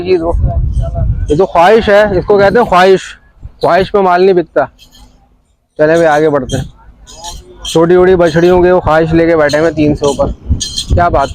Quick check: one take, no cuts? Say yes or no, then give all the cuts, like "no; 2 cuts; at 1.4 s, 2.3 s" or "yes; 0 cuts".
yes; 0 cuts